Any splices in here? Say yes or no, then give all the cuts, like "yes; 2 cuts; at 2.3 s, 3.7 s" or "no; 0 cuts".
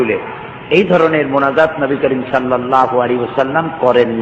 no; 0 cuts